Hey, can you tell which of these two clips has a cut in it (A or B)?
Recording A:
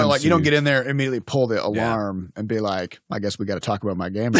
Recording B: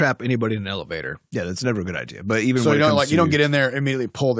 A